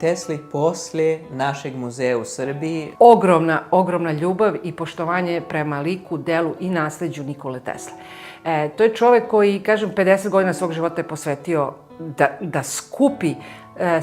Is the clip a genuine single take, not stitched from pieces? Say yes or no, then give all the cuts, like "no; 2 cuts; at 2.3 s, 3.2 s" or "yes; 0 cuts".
no; 1 cut; at 2.9 s